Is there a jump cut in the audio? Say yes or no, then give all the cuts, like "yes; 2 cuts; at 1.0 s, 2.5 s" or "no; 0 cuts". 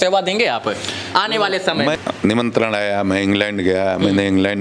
yes; 1 cut; at 2.0 s